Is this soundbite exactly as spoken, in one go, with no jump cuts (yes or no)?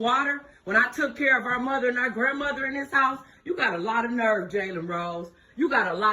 no